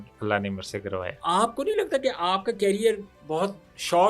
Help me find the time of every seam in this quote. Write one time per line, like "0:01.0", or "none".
0:01.1